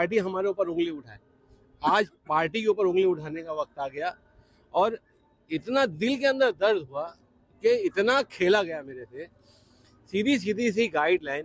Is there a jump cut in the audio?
no; 0 cuts

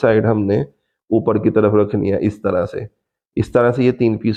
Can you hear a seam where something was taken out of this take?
no; 0 cuts

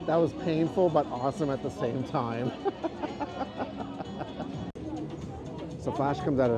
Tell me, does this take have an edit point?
no; 0 cuts

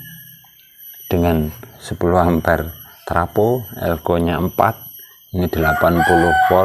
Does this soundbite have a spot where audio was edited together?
yes; 1 cut; at 1.8 s

